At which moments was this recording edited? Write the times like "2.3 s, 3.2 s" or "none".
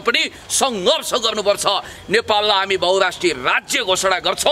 none